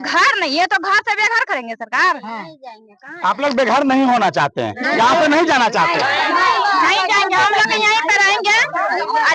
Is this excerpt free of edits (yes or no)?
yes